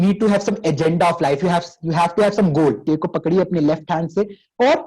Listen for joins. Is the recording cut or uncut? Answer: cut